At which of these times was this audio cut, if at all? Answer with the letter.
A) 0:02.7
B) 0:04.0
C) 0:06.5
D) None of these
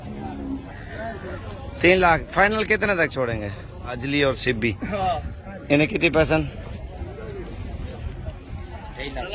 B